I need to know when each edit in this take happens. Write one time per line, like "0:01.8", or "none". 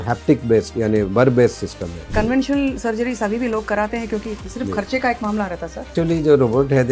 0:02.0
0:04.4
0:05.9